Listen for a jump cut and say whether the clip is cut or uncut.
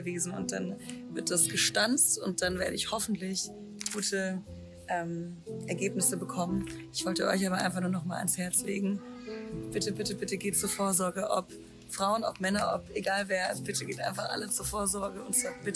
uncut